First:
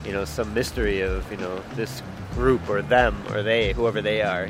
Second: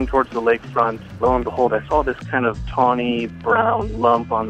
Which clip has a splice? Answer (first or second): second